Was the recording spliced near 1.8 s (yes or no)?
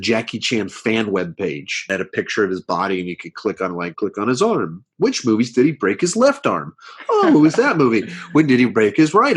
yes